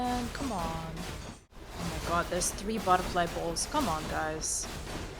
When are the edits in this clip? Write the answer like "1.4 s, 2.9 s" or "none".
1.6 s

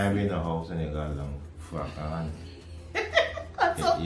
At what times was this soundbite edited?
none

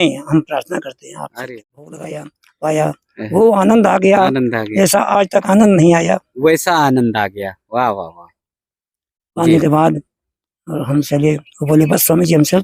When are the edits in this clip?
2.0 s

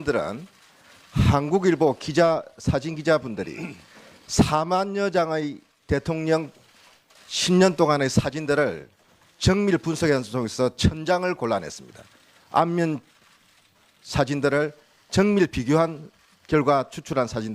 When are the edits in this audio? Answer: 13.7 s

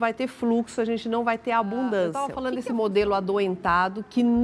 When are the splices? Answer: 2.4 s

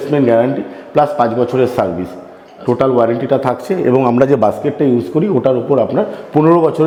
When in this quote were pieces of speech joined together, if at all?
none

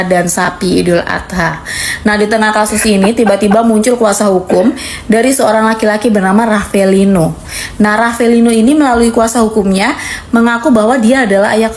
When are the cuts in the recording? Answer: none

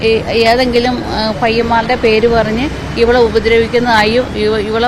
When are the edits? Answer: 3.6 s

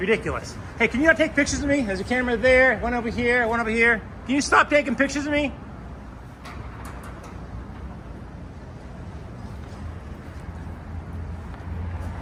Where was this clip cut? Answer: none

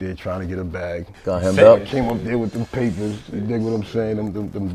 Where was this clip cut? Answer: 1.1 s

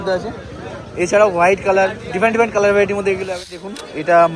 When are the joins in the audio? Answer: 3.4 s

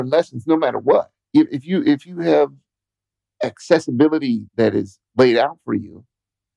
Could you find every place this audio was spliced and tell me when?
1.1 s

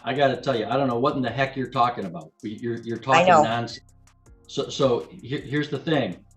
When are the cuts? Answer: none

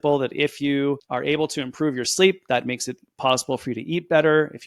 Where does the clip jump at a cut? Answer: none

